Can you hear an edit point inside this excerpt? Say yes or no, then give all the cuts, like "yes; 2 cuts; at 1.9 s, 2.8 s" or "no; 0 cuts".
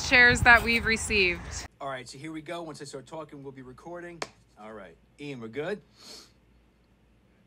yes; 1 cut; at 1.6 s